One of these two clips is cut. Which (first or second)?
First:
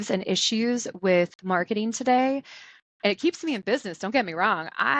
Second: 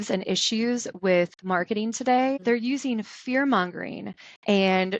second